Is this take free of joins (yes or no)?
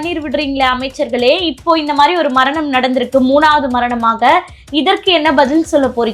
yes